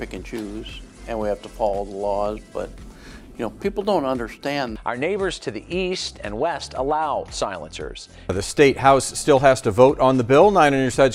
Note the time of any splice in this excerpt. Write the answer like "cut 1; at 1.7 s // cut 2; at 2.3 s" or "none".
none